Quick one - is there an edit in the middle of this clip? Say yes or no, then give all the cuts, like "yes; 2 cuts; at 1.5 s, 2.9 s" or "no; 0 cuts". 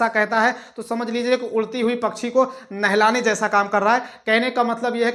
no; 0 cuts